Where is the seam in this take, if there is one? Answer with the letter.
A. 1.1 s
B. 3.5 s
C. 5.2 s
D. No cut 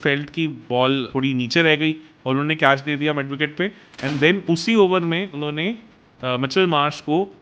A